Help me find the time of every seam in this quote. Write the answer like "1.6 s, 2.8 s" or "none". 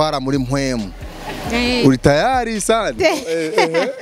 2.9 s